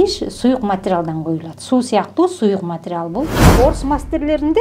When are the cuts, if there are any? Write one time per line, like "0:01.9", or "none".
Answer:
0:03.4